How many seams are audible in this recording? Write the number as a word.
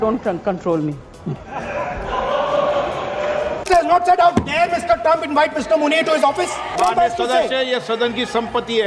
two